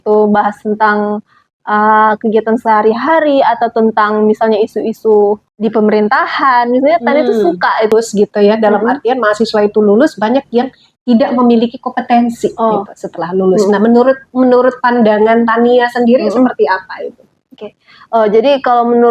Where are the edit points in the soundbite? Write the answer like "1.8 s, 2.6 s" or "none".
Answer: 5.5 s, 7.9 s